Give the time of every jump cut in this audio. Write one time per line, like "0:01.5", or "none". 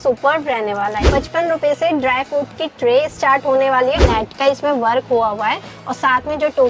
0:01.0
0:04.0